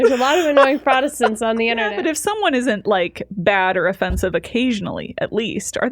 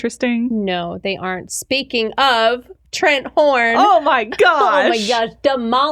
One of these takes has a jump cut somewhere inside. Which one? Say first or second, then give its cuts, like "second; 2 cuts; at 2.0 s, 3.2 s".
first; 1 cut; at 1.9 s